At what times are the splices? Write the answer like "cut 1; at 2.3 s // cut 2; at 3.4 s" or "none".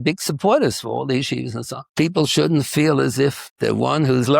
cut 1; at 1.8 s // cut 2; at 3.5 s

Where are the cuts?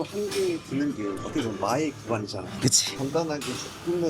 cut 1; at 1.2 s // cut 2; at 2.7 s

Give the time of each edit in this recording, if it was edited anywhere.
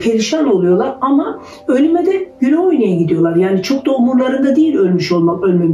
none

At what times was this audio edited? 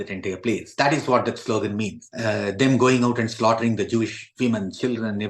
cut 1; at 2.1 s

